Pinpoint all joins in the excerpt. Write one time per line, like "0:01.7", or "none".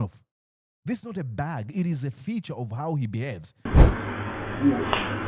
0:03.7